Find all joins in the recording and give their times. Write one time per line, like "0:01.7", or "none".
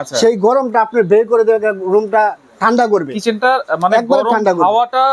none